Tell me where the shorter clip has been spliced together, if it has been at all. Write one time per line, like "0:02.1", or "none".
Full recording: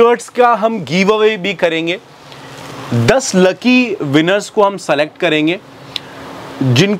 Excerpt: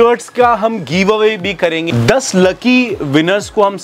0:01.9